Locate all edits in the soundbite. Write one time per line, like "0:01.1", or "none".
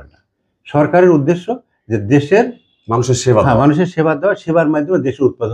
none